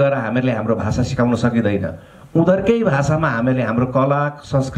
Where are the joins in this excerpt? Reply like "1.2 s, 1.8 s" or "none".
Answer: none

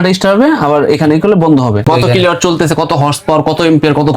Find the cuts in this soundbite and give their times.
1.8 s

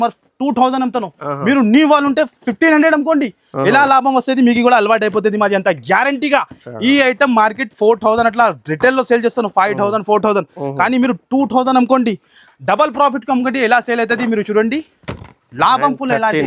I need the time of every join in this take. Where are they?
none

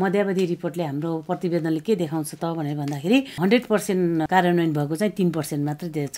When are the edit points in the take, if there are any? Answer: 3.3 s, 4.3 s

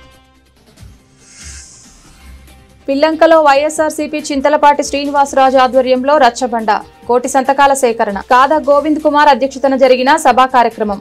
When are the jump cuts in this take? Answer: 1.1 s, 2.5 s

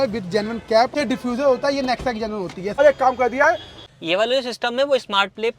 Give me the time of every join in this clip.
0.9 s, 2.8 s, 3.8 s

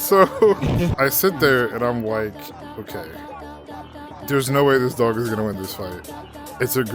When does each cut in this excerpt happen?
0.9 s

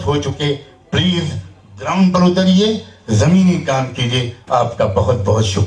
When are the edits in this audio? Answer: none

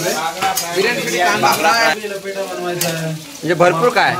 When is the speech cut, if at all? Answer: 2.0 s

